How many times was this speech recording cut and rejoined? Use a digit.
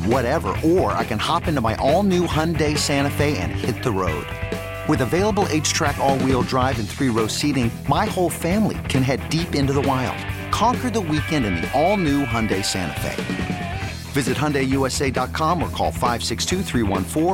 0